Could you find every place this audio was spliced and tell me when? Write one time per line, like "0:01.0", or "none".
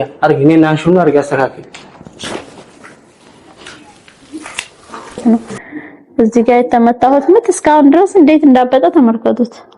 0:05.2